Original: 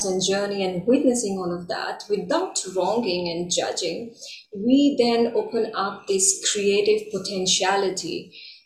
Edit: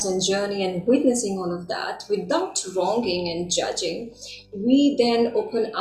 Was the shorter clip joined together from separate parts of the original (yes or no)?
no